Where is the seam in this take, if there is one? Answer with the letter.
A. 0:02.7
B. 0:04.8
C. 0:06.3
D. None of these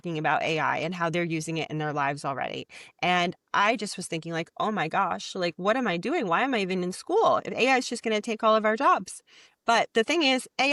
D